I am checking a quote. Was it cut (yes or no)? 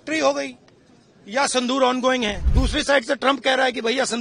yes